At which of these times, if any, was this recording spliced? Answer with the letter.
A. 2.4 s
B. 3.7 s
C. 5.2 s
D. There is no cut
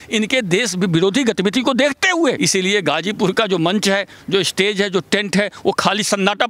A